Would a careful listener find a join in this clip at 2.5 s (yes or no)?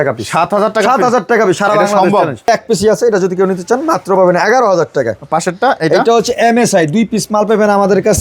yes